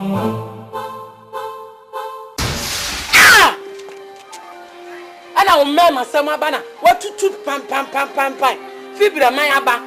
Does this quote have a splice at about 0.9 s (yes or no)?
no